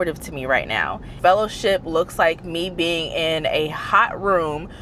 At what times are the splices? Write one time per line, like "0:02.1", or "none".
0:01.1